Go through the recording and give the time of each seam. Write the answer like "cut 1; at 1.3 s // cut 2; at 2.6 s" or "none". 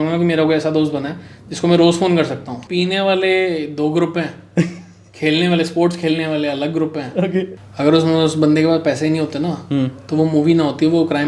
cut 1; at 2.6 s // cut 2; at 7.6 s